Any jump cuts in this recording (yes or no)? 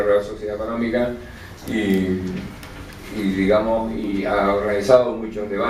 yes